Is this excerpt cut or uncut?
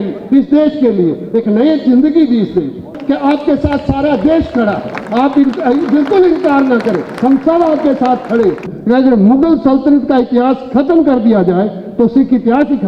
cut